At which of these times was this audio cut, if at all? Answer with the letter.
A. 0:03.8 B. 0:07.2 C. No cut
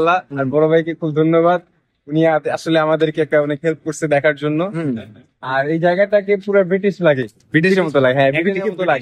C